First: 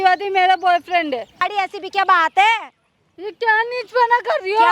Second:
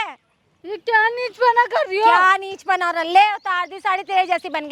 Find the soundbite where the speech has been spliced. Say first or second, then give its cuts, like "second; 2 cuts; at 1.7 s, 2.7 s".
first; 1 cut; at 1.5 s